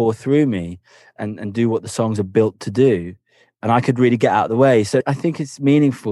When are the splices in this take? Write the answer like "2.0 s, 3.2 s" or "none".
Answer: 1.1 s, 5.0 s